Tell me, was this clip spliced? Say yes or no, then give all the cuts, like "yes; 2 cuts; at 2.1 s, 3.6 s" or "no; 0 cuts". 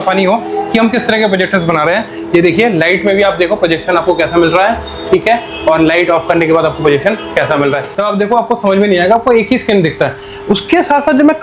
yes; 1 cut; at 7.9 s